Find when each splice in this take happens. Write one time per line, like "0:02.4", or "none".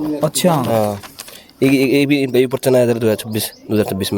none